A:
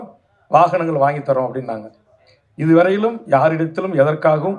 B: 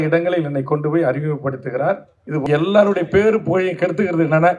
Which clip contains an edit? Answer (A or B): B